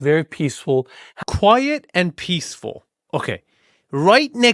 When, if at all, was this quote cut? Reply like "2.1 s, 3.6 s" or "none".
1.0 s